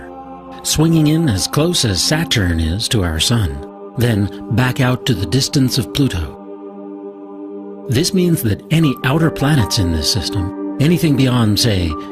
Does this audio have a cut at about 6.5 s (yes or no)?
yes